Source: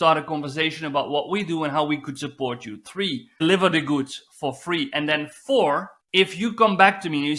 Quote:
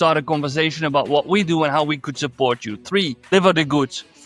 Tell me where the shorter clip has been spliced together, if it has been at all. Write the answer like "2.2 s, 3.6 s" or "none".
3.1 s